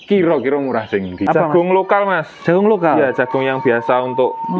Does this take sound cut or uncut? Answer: cut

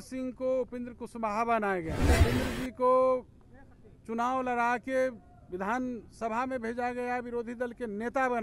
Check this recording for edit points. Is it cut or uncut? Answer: cut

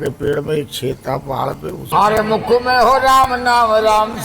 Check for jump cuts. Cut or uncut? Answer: cut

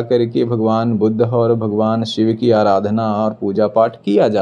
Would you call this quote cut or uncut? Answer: uncut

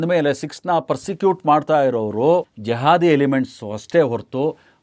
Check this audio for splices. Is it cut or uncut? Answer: cut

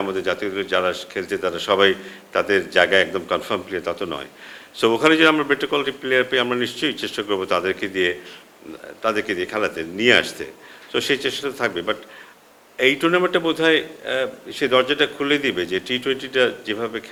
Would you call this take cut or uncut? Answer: uncut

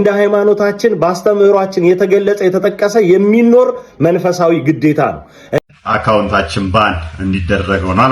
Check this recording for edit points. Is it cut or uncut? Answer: cut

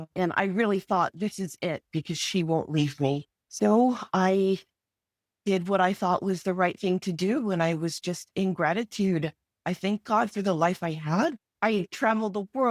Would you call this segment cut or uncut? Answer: uncut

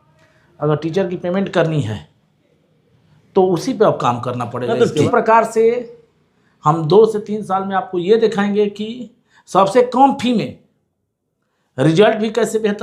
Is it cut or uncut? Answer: cut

